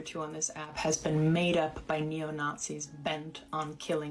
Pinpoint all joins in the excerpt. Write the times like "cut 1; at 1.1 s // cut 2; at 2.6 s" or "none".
cut 1; at 2.6 s